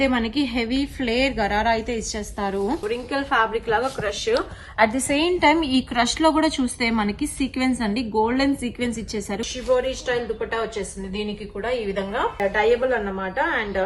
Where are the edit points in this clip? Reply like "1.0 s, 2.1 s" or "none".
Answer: 2.8 s, 9.5 s, 12.4 s